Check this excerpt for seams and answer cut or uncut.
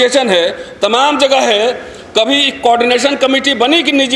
uncut